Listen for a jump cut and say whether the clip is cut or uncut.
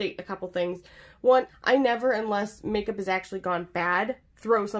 cut